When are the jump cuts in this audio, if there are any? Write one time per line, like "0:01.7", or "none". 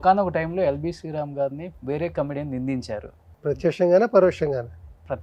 0:01.7
0:03.2